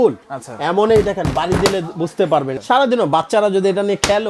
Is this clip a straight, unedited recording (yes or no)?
no